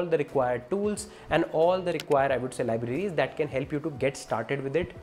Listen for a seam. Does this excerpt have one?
no; 0 cuts

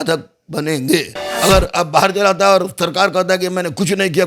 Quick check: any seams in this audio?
yes; 1 cut; at 1.2 s

